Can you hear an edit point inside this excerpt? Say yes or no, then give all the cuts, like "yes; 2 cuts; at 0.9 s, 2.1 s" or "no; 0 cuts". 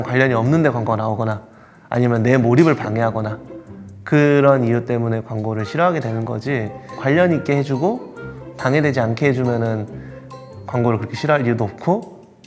yes; 1 cut; at 6.9 s